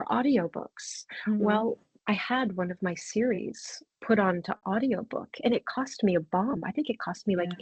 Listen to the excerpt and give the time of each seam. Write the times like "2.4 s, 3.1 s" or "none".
1.9 s